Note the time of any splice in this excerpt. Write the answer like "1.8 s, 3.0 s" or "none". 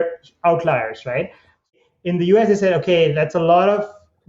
1.7 s